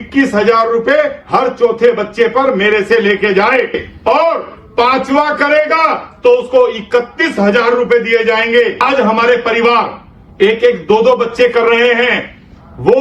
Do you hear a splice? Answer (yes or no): yes